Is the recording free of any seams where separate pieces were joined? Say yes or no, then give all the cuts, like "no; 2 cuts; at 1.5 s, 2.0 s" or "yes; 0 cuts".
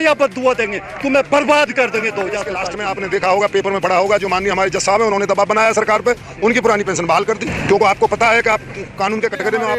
no; 1 cut; at 2.7 s